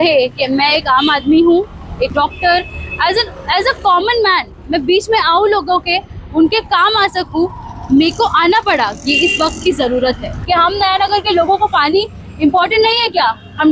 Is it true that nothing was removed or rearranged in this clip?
no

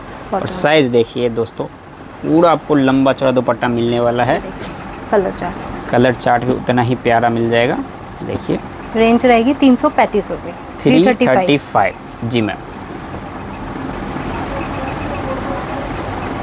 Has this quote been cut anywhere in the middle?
no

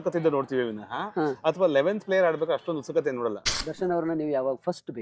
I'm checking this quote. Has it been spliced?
yes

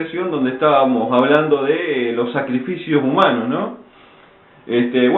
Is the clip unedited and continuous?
no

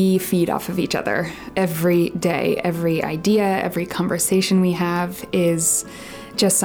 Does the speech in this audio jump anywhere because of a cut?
no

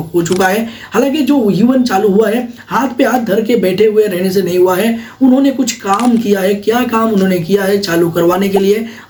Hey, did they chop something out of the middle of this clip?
no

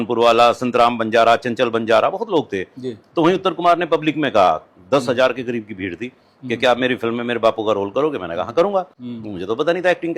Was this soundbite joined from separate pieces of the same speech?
no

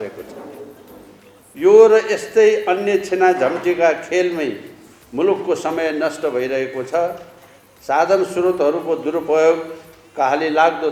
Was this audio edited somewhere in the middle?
no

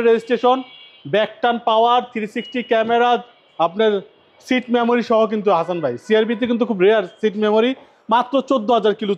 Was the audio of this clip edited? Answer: no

